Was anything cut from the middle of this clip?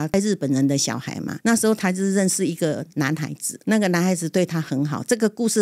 no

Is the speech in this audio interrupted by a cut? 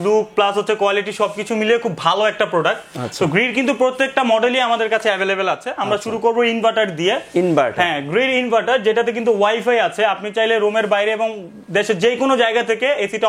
no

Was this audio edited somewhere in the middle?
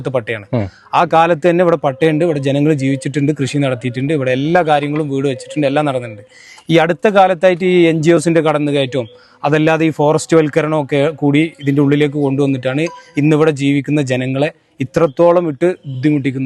no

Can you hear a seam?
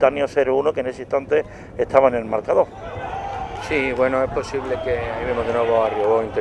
yes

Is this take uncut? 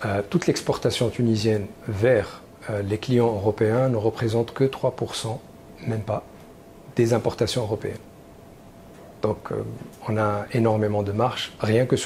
yes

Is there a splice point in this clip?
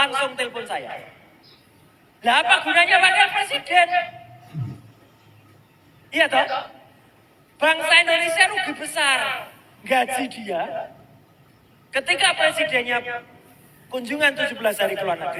no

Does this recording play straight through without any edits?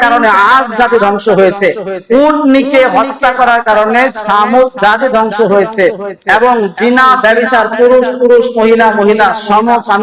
yes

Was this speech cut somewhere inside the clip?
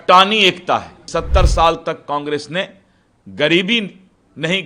yes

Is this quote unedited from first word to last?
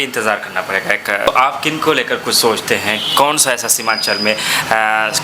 no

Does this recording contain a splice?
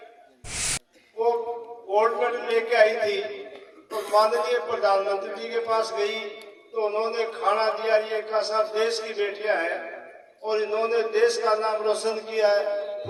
no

